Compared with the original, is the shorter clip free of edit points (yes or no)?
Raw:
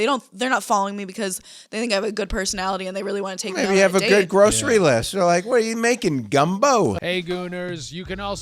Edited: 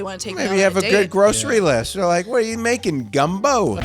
yes